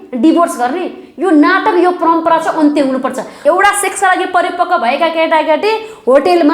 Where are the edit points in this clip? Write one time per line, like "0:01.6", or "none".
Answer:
0:03.3